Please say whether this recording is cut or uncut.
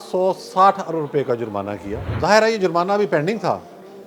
cut